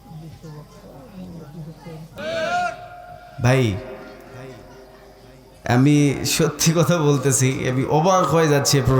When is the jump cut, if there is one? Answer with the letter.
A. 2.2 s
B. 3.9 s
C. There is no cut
A